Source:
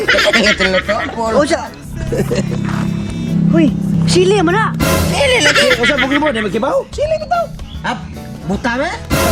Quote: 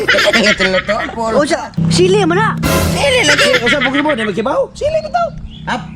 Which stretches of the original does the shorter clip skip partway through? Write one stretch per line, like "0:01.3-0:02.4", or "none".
0:01.8-0:03.9